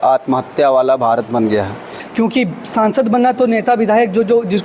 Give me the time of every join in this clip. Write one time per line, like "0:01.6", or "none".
0:02.0